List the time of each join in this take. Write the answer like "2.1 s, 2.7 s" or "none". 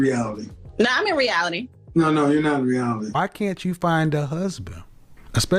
3.3 s